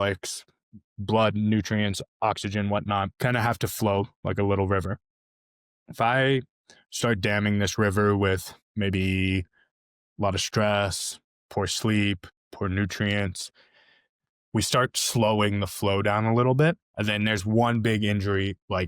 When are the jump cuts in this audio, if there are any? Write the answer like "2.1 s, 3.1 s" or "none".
3.1 s, 8.6 s, 16.9 s

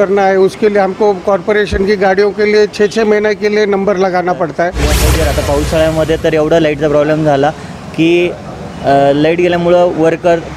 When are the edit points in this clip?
5.0 s

